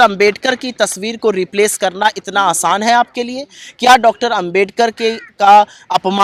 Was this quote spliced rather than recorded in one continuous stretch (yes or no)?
no